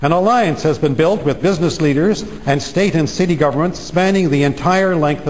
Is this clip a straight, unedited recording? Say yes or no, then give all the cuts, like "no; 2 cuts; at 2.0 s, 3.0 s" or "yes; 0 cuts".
yes; 0 cuts